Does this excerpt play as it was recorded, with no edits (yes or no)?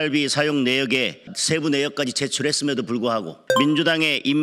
no